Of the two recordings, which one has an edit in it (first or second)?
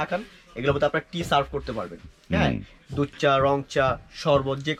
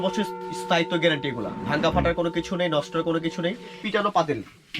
second